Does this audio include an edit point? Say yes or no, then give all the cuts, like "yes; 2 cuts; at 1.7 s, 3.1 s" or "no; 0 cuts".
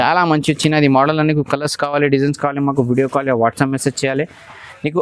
no; 0 cuts